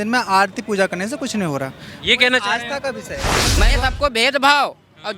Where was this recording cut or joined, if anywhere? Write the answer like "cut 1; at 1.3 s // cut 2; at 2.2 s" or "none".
cut 1; at 3.5 s